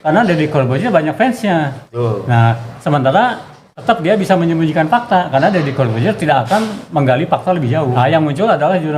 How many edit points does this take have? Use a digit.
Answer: 1